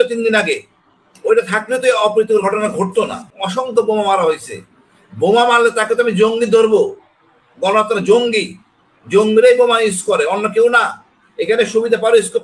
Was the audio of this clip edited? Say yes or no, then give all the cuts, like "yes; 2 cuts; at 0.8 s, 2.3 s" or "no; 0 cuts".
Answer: yes; 1 cut; at 3.3 s